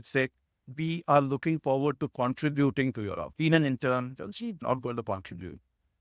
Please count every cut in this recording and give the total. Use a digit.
2